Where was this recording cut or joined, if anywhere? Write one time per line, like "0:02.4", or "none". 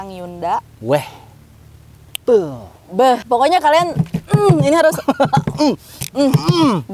0:03.2